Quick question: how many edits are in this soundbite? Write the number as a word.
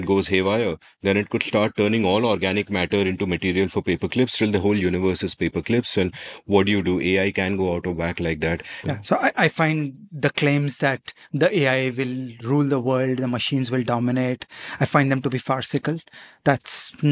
one